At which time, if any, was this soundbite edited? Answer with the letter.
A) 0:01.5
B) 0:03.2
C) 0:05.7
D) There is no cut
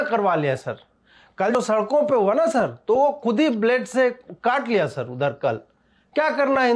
A